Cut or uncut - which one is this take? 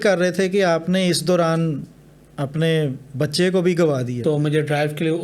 cut